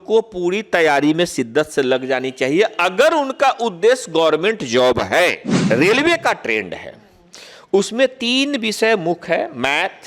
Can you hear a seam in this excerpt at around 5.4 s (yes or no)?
yes